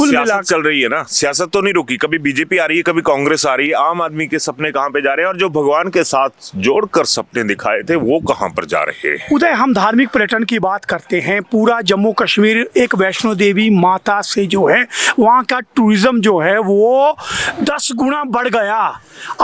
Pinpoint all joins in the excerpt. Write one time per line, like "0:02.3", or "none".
none